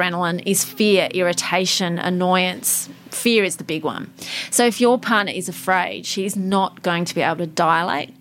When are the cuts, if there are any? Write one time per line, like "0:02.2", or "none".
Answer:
none